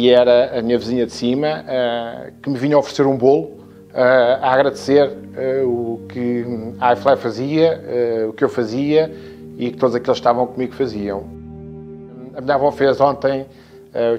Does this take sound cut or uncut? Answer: cut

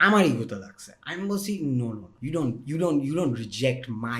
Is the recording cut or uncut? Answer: cut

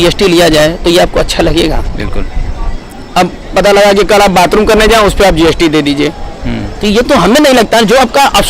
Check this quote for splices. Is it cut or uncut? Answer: uncut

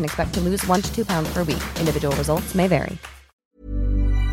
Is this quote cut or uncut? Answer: cut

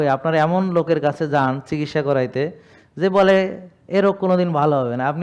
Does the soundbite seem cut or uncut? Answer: uncut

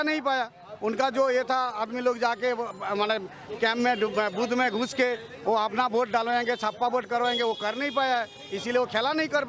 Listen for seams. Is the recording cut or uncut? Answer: uncut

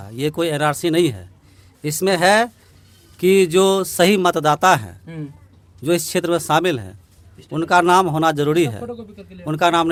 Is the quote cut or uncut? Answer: uncut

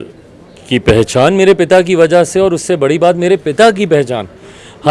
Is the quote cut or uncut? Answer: uncut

